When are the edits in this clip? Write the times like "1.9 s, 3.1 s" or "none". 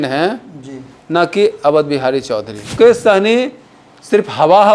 2.7 s